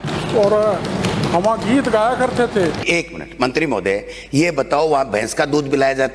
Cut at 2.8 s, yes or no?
yes